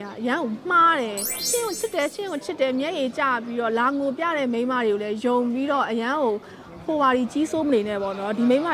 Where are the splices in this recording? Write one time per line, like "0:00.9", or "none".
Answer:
0:01.4